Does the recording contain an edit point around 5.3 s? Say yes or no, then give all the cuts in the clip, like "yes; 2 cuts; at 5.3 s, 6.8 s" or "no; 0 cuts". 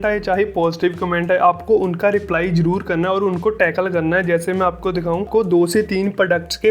yes; 1 cut; at 5.3 s